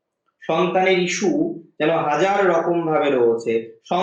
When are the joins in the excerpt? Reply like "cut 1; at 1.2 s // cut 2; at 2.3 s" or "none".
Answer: none